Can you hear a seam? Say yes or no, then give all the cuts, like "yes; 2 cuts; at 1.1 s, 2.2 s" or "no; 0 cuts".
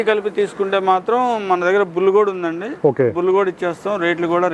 no; 0 cuts